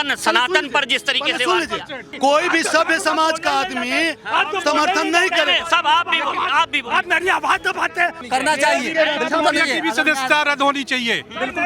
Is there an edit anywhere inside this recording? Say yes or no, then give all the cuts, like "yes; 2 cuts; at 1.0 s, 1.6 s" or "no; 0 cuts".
yes; 2 cuts; at 2.1 s, 8.2 s